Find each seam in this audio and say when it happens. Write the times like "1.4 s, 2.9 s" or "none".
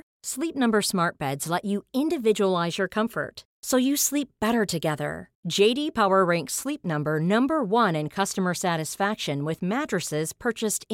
none